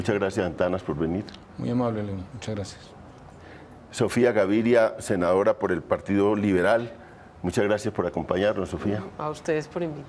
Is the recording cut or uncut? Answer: cut